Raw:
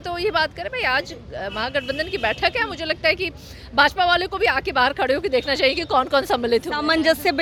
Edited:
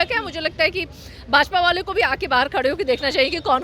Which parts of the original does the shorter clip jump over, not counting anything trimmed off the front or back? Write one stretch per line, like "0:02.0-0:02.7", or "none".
none

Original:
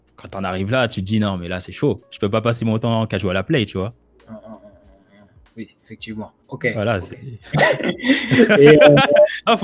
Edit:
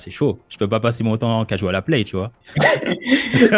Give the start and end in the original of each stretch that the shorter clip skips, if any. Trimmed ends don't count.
0:04.0-0:07.4

